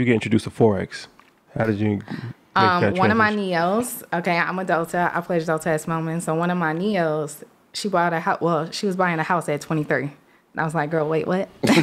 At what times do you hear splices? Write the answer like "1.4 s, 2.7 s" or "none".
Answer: none